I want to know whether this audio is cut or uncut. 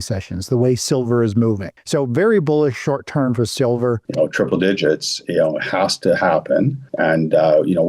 cut